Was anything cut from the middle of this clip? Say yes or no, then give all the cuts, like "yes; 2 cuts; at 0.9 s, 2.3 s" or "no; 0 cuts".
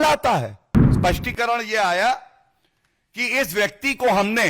yes; 1 cut; at 0.9 s